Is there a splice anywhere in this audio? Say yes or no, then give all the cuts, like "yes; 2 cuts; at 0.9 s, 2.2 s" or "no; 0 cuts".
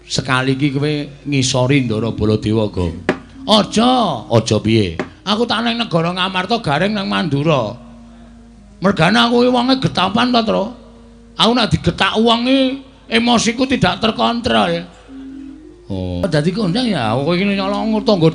yes; 1 cut; at 16.2 s